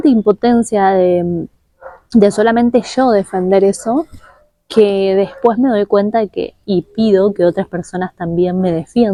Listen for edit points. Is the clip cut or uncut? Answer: uncut